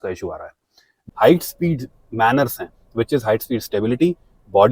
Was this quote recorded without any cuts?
no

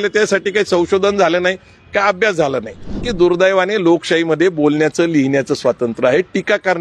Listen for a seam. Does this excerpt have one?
yes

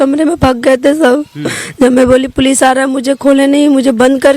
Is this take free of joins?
yes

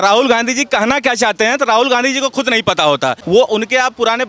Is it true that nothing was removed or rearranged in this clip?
no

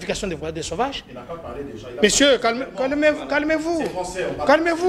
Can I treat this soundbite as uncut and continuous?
yes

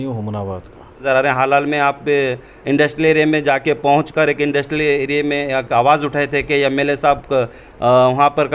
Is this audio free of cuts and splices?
no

